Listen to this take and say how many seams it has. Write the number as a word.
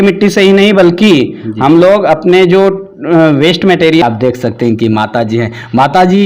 one